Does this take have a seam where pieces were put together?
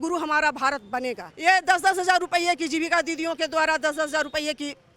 yes; 1 cut; at 1.3 s

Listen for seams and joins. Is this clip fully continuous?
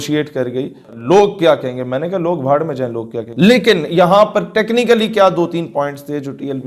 no; 2 cuts; at 1.0 s, 3.2 s

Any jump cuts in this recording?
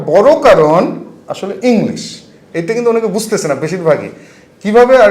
no; 0 cuts

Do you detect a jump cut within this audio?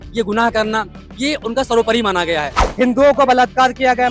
yes; 1 cut; at 2.6 s

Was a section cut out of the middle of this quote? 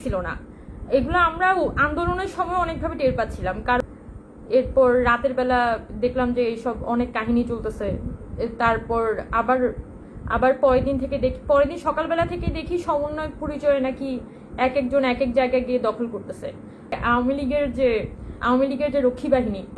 yes; 2 cuts; at 3.8 s, 17.0 s

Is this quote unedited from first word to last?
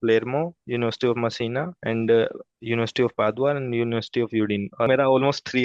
no; 2 cuts; at 1.7 s, 4.9 s

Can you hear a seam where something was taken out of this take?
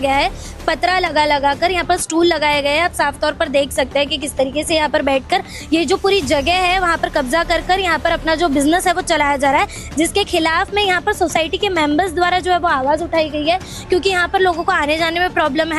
no; 0 cuts

